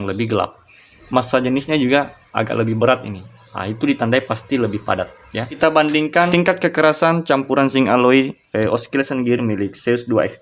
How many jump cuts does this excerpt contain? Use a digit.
3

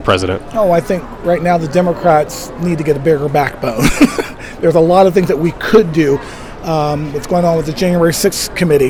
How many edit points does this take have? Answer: 0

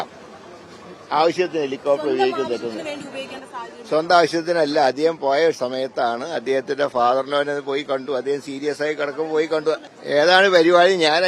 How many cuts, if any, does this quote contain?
1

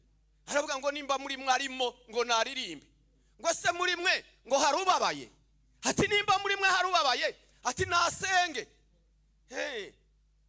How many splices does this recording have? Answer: 0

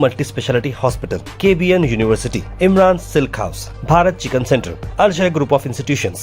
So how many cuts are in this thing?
0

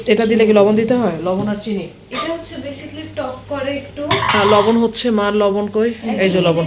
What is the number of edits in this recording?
0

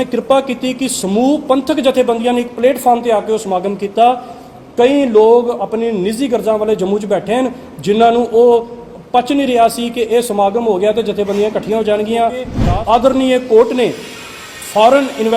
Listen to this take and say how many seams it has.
1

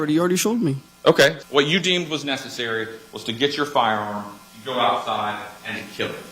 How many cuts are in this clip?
1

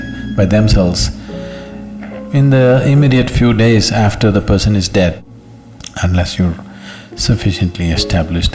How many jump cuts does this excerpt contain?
1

